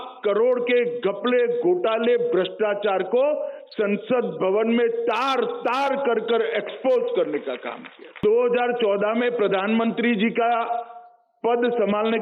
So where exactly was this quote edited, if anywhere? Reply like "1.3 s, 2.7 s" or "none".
8.2 s